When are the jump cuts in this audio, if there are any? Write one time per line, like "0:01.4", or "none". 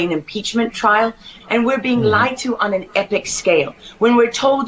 0:01.3